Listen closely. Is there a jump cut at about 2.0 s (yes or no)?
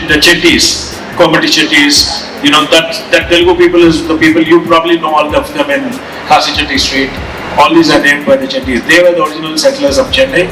no